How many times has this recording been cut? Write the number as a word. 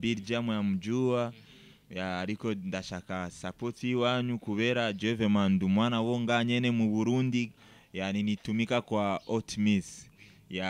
one